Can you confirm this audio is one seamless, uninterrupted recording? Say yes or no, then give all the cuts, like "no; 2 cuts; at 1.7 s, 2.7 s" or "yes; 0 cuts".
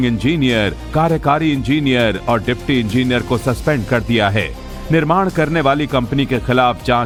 yes; 0 cuts